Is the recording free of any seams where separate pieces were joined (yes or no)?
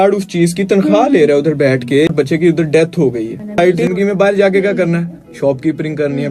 no